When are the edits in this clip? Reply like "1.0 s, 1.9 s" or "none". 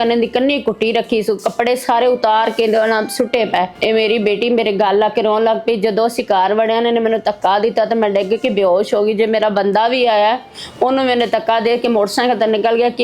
none